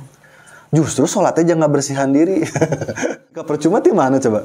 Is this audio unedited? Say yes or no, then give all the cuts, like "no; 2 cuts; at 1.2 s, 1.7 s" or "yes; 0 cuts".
no; 1 cut; at 3.4 s